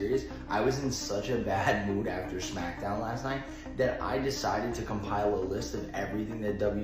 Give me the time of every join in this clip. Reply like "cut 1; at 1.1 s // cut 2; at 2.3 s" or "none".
none